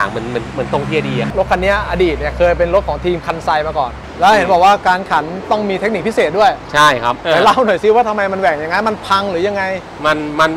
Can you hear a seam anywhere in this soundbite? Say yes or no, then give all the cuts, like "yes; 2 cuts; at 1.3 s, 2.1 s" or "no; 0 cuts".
yes; 3 cuts; at 1.3 s, 4.0 s, 7.2 s